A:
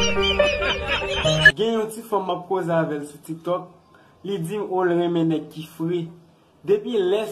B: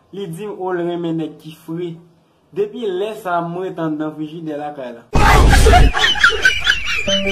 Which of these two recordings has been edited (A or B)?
A